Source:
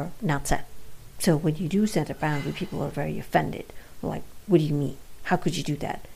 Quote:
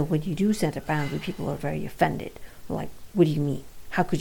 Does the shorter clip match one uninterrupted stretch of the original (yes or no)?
yes